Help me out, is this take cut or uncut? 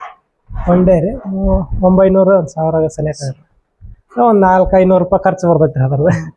uncut